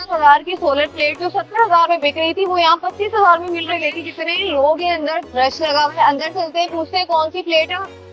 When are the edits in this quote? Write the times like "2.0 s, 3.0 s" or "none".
3.7 s